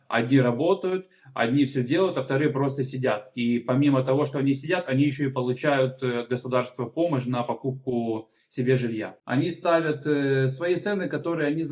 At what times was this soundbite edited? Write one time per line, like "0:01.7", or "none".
0:09.1